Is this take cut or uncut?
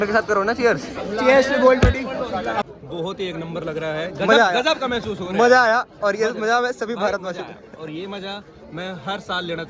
cut